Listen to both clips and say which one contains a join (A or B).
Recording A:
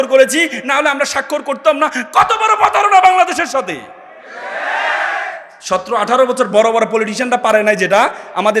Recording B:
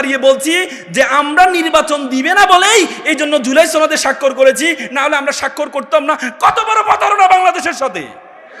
A